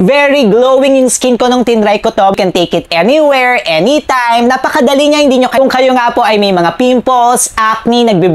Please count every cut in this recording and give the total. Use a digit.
2